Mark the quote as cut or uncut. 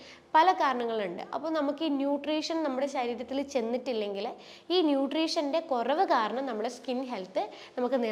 uncut